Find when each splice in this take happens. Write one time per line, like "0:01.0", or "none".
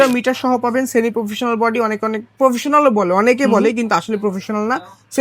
none